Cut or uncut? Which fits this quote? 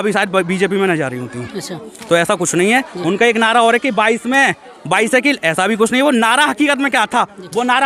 uncut